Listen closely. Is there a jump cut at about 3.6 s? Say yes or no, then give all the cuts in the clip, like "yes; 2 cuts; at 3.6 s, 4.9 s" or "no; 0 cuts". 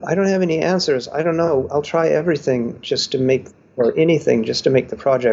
no; 0 cuts